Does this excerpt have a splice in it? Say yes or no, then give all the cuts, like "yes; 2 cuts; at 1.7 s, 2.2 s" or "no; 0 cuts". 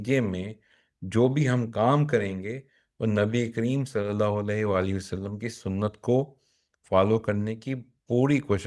no; 0 cuts